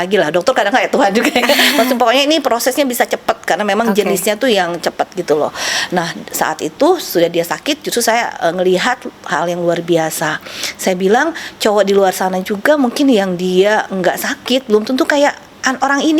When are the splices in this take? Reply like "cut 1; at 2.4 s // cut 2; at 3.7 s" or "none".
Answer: none